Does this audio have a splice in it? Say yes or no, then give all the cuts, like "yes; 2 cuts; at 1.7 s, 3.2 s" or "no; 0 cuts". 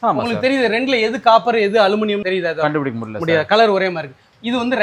no; 0 cuts